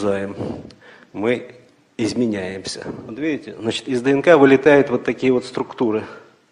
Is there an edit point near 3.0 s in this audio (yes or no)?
yes